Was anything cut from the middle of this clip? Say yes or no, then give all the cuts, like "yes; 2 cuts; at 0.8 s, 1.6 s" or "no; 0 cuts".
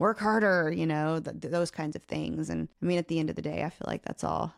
yes; 1 cut; at 2.7 s